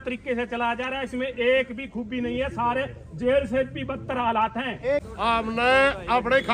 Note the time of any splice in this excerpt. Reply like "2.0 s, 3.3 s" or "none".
5.1 s

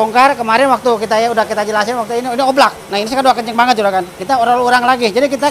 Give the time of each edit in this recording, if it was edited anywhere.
4.1 s

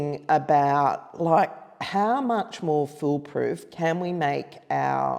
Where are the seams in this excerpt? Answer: none

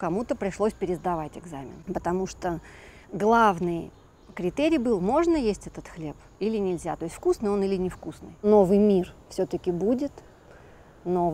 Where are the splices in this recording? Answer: 1.7 s, 8.4 s

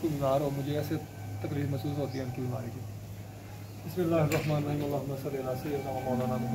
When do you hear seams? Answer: none

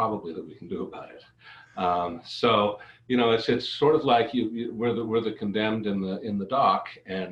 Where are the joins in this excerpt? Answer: none

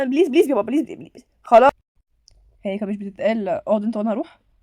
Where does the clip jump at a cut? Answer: 1.7 s

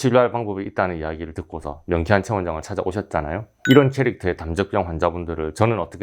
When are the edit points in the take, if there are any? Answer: 3.5 s

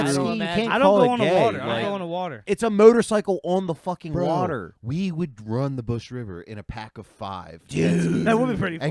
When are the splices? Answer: 2.4 s

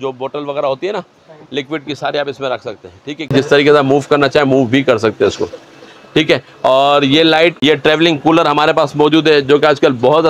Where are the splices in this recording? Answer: 3.3 s, 7.6 s

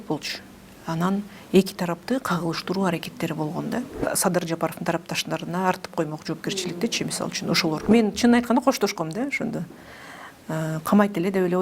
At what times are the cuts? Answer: 4.0 s, 7.8 s

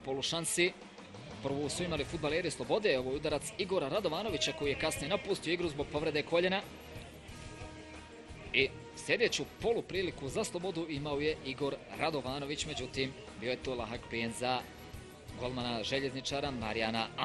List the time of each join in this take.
5.0 s

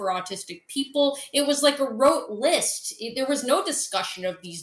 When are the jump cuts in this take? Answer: none

